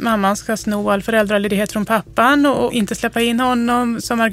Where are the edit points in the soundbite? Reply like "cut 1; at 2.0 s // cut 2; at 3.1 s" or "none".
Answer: cut 1; at 2.7 s